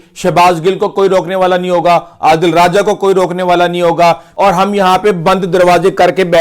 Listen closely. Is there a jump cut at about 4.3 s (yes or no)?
yes